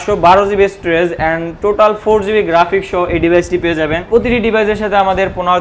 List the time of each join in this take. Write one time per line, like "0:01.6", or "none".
0:04.0